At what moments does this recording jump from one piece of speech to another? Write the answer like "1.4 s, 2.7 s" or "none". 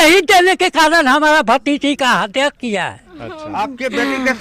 3.4 s